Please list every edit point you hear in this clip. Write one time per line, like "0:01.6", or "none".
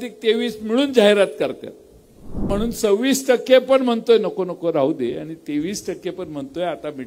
0:02.4